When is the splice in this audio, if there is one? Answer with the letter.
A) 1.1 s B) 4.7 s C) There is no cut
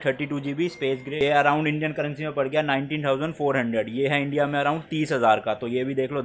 A